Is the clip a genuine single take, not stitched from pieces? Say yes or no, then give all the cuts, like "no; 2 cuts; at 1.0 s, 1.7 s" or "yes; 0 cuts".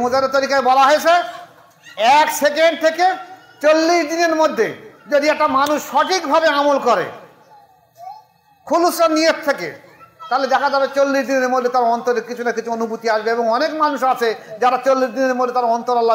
yes; 0 cuts